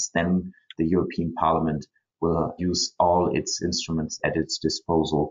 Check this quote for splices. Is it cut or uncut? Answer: cut